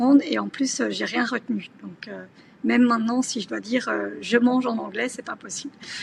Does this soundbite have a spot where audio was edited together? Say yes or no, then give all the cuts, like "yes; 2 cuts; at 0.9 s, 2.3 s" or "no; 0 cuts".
no; 0 cuts